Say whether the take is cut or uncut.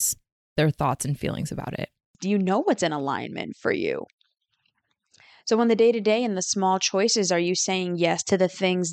cut